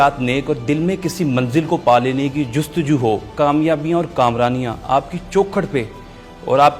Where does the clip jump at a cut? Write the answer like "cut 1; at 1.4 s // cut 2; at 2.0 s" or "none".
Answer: cut 1; at 3.3 s